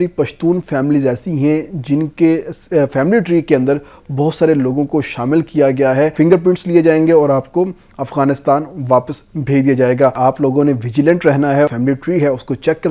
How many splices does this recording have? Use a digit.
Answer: 3